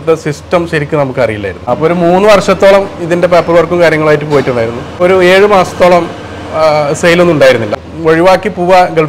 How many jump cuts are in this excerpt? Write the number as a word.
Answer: two